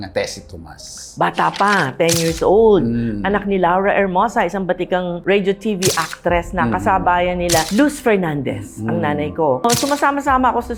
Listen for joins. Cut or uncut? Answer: uncut